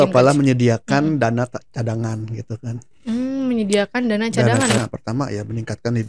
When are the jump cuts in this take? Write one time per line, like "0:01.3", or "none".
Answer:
0:04.8

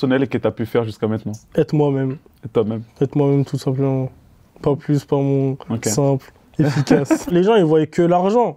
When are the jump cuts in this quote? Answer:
0:01.4
0:07.3

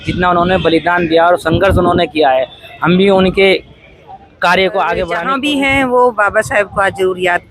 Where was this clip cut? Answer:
0:05.2

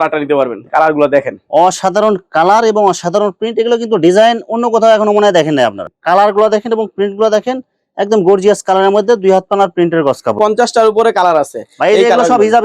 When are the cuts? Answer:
0:05.8
0:10.4

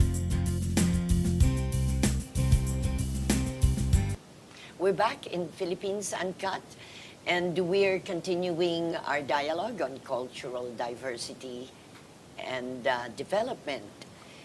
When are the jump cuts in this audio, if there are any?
0:10.3

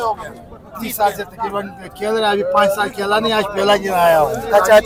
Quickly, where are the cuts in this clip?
none

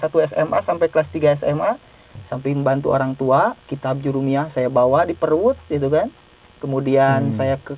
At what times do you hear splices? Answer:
0:02.1

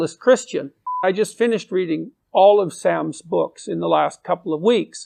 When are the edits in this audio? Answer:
0:01.0

